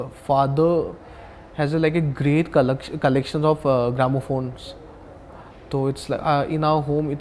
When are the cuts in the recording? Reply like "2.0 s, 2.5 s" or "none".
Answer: none